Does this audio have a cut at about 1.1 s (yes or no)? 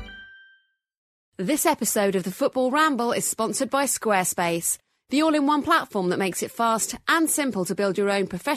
yes